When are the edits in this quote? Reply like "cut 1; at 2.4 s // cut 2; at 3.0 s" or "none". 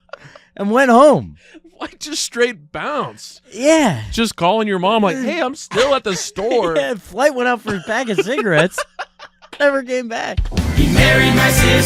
cut 1; at 10.7 s